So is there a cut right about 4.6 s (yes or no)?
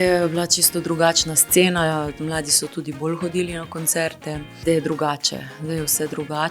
yes